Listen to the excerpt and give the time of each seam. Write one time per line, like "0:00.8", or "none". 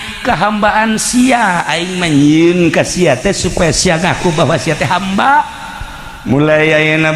none